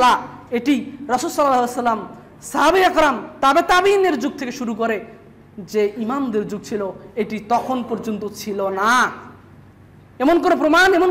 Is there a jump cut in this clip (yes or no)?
no